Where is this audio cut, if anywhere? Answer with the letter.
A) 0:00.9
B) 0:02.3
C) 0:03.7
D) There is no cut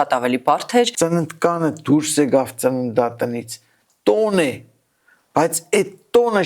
A